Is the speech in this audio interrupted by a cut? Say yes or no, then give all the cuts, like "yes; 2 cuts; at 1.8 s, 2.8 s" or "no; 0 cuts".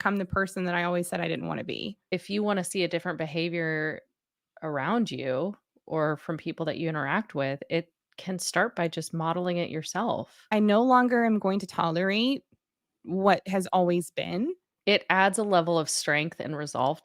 yes; 3 cuts; at 2.1 s, 10.3 s, 14.7 s